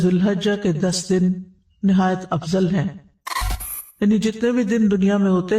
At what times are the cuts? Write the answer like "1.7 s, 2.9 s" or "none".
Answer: 3.6 s